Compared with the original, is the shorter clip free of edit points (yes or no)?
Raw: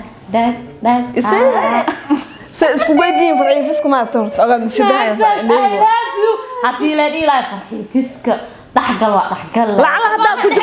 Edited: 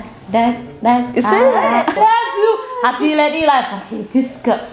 no